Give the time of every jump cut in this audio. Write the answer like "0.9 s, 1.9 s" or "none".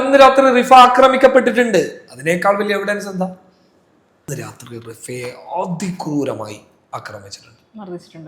4.3 s